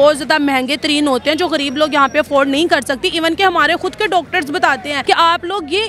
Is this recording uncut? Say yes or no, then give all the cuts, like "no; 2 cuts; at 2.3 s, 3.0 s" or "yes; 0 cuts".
no; 1 cut; at 4.9 s